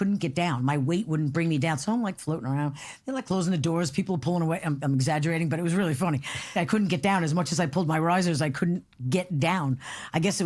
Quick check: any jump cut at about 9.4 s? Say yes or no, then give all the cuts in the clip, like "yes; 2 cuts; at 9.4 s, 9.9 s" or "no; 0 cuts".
no; 1 cut; at 6.5 s